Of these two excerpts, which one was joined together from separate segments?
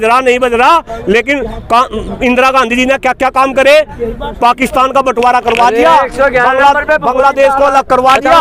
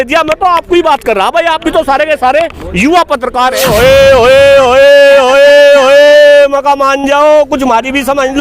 second; 1 cut; at 3.6 s

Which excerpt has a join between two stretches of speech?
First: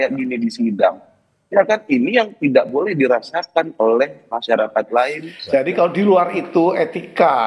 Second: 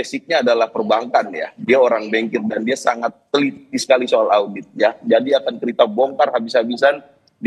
first; 1 cut; at 5.3 s

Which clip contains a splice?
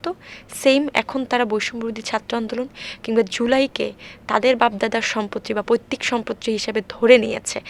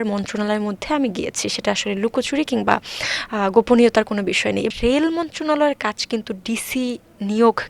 second; 1 cut; at 4.7 s

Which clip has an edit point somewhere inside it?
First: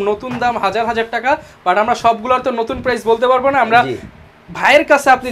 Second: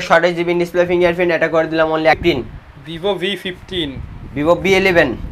second; 1 cut; at 2.2 s

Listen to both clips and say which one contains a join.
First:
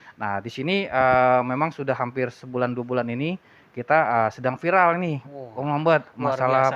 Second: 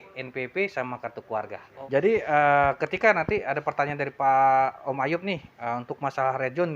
second; 1 cut; at 1.7 s

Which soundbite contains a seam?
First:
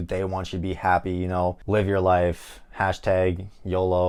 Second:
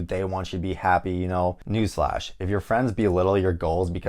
second; 1 cut; at 1.6 s

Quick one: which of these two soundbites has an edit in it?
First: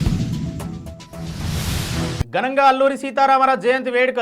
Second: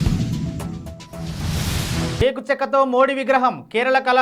second; 1 cut; at 2.1 s

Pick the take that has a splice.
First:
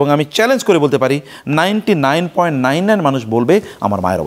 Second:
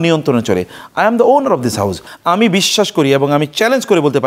second; 1 cut; at 2.0 s

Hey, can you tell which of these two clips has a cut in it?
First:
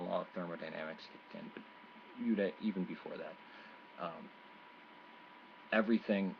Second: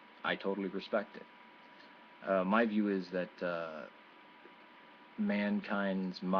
second; 1 cut; at 4.7 s

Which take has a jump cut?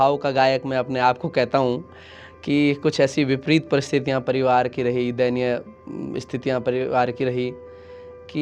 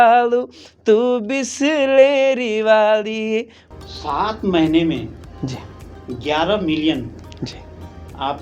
second; 1 cut; at 3.6 s

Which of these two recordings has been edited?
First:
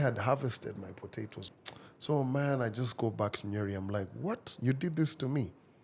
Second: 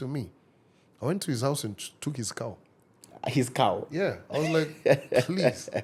first; 1 cut; at 1.4 s

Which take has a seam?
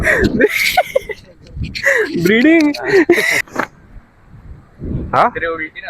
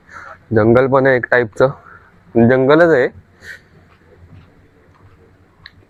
first; 1 cut; at 3.4 s

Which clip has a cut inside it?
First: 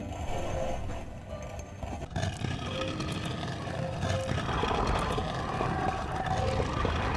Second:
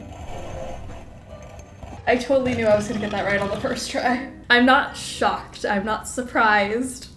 second; 2 cuts; at 2.0 s, 4.3 s

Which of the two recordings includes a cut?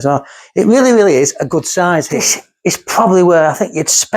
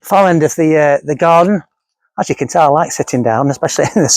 first; 1 cut; at 2.3 s

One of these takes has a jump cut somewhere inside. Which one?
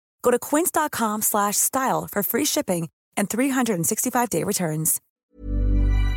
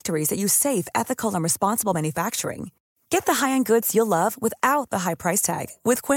first; 1 cut; at 5.0 s

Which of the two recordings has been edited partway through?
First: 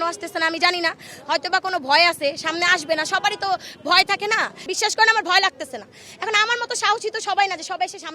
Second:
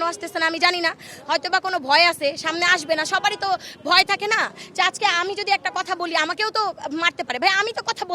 first; 1 cut; at 4.7 s

